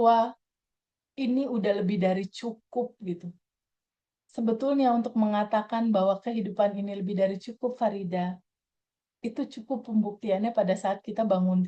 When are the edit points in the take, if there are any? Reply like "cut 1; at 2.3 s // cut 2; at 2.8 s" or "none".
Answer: none